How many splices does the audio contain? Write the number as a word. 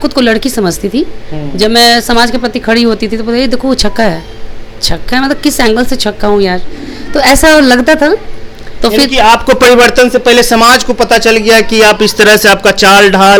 zero